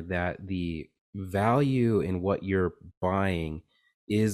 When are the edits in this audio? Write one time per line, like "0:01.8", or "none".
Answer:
none